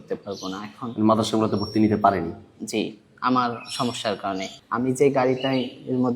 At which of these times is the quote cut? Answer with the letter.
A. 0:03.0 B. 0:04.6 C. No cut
B